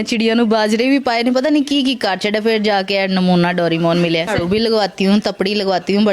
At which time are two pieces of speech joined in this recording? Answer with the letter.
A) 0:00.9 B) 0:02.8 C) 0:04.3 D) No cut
C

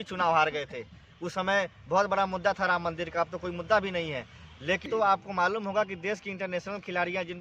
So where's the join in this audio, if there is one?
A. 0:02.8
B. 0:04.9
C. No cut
B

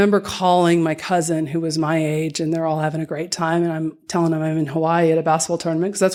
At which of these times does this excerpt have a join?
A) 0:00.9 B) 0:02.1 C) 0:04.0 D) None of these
D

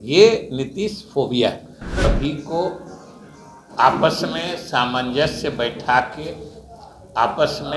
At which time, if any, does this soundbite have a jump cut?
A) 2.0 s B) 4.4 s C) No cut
A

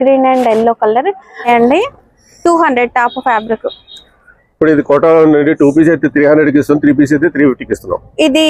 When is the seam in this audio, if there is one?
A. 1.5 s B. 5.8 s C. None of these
A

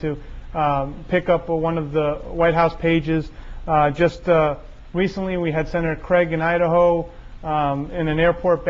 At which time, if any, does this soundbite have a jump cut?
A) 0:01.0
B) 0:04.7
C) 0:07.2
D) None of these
C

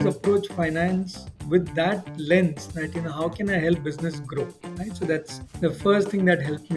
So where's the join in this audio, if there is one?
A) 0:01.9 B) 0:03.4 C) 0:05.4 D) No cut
C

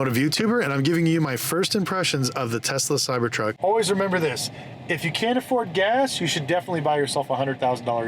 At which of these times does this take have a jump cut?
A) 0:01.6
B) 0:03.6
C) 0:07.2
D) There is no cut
B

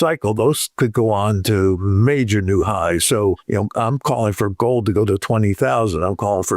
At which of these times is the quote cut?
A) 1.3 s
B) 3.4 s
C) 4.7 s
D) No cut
B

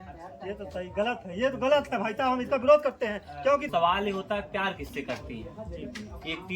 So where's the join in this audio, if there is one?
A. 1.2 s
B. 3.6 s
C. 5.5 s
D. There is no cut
B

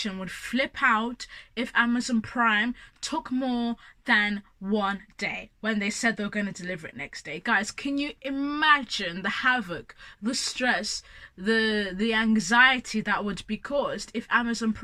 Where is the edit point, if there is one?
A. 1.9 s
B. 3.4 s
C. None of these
C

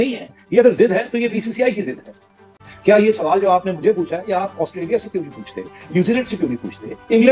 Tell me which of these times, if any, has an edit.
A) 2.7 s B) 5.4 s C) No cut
A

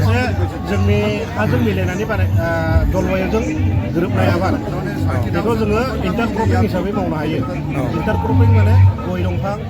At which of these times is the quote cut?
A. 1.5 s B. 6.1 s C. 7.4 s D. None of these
D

